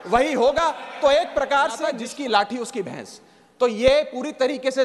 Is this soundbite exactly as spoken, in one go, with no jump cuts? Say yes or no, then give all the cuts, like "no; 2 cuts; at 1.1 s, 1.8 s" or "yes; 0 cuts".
no; 1 cut; at 2.1 s